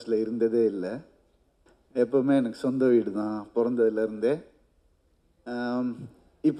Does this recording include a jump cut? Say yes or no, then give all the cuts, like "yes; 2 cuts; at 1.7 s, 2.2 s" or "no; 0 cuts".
no; 0 cuts